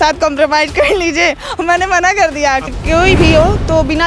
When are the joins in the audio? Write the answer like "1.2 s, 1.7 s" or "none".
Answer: 2.7 s